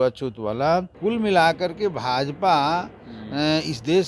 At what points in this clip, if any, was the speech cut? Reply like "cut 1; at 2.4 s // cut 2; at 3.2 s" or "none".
cut 1; at 0.9 s